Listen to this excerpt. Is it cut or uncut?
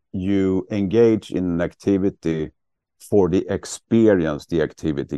uncut